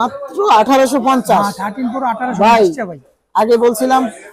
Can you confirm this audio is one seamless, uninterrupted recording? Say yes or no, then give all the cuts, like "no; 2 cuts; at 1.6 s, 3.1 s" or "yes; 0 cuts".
yes; 0 cuts